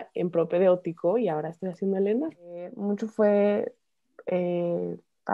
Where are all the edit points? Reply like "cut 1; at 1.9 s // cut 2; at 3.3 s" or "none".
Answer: cut 1; at 2.8 s

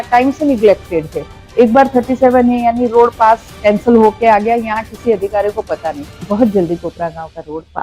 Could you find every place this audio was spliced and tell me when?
cut 1; at 6.2 s

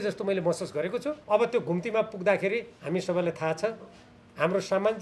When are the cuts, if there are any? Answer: cut 1; at 1.1 s // cut 2; at 2.7 s

